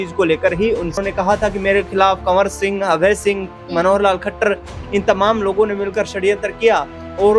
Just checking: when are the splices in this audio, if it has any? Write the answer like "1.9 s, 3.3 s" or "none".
0.9 s